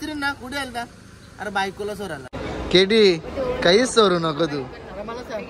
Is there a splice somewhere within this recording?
yes; 1 cut; at 2.3 s

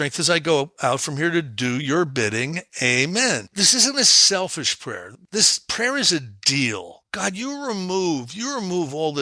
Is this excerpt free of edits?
no; 3 cuts; at 3.5 s, 5.1 s, 7.1 s

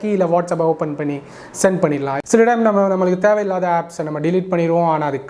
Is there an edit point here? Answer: yes; 1 cut; at 2.1 s

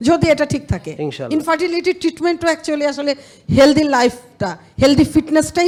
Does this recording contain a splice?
no; 0 cuts

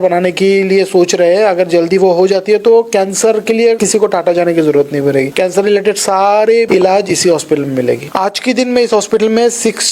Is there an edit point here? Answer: yes; 4 cuts; at 3.8 s, 5.3 s, 6.7 s, 8.1 s

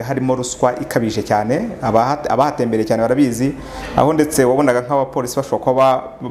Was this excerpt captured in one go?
yes; 0 cuts

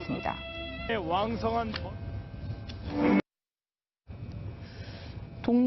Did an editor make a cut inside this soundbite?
yes; 1 cut; at 2.0 s

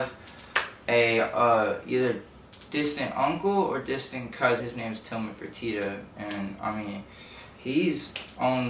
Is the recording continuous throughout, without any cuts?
no; 1 cut; at 4.7 s

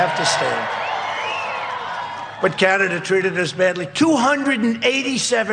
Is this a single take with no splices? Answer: no; 1 cut; at 2.4 s

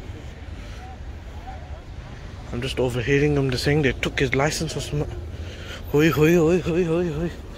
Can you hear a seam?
no; 0 cuts

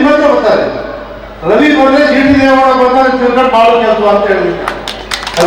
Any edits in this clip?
no; 0 cuts

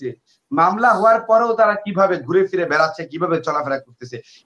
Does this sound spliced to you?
no; 0 cuts

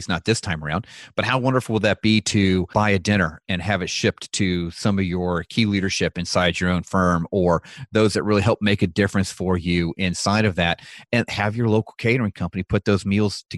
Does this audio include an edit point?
yes; 1 cut; at 2.7 s

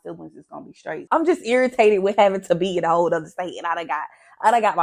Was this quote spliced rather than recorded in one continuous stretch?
yes; 1 cut; at 1.0 s

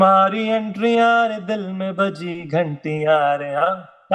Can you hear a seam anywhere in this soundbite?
no; 0 cuts

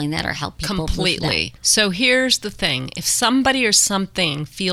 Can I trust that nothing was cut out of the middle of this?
no; 1 cut; at 1.5 s

